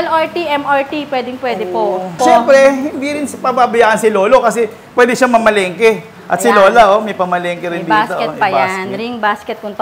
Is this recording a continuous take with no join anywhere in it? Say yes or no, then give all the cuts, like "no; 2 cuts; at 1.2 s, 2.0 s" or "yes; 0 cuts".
no; 1 cut; at 2.2 s